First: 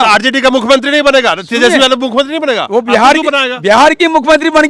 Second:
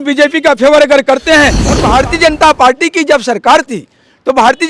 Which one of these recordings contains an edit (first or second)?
second